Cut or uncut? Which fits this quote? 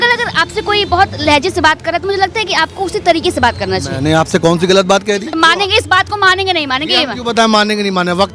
cut